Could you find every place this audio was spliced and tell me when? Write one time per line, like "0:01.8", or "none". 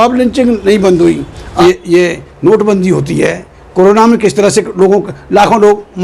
0:01.4